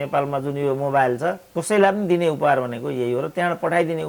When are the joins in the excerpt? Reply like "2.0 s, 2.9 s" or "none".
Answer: 1.4 s